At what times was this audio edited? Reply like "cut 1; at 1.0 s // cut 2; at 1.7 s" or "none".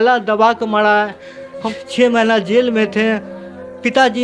cut 1; at 1.8 s